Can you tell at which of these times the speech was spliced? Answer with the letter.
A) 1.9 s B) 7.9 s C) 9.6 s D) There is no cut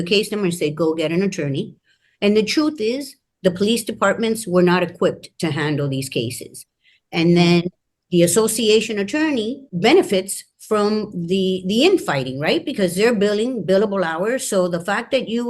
C